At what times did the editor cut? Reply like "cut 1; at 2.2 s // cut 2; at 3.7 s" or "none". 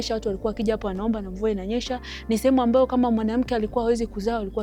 none